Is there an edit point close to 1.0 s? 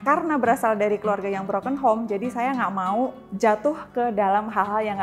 no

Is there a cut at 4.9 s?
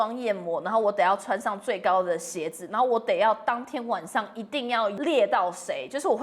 yes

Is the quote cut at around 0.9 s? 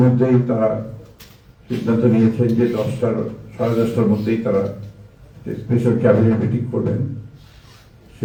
no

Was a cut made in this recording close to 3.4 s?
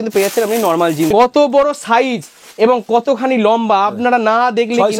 no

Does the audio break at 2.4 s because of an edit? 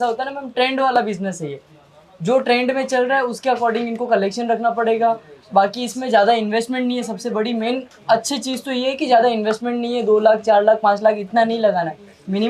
no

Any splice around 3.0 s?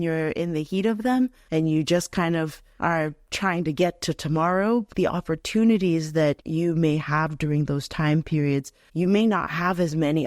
yes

